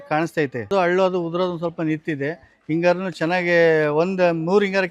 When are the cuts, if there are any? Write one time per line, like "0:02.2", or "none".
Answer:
none